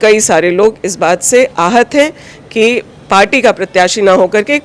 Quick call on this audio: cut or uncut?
uncut